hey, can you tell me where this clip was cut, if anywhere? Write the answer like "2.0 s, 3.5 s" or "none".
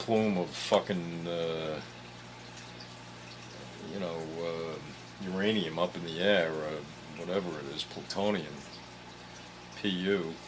none